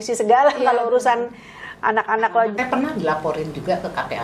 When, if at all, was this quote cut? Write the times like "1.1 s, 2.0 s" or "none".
2.5 s